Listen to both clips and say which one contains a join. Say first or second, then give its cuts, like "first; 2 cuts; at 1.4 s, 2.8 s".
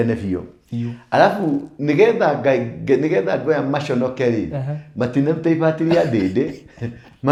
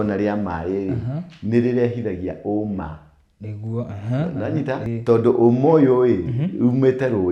second; 1 cut; at 4.9 s